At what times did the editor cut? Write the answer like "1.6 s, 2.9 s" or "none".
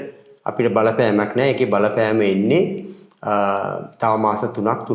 none